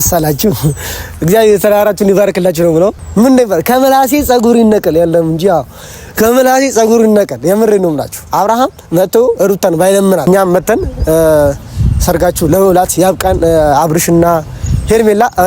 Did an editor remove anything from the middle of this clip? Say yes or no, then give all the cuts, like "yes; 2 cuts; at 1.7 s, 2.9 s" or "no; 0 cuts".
yes; 2 cuts; at 3.0 s, 10.3 s